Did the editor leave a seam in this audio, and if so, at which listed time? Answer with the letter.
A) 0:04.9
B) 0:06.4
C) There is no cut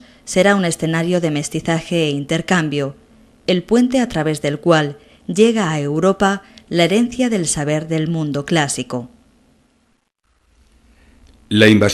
C